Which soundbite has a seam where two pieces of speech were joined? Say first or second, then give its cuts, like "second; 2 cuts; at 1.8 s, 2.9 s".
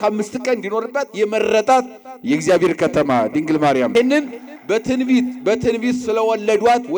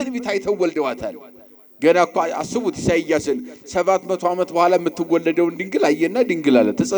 first; 1 cut; at 3.9 s